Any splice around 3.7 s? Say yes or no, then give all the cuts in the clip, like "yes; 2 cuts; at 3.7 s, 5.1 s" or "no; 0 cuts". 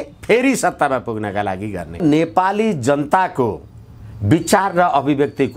no; 1 cut; at 2.0 s